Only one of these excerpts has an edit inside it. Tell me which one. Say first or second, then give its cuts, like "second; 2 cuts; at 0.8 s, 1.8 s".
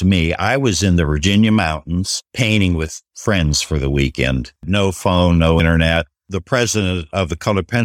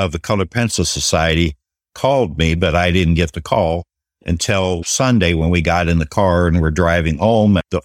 first; 4 cuts; at 2.2 s, 3.0 s, 4.6 s, 5.9 s